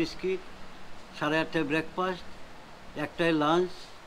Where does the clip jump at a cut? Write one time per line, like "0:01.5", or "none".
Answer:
none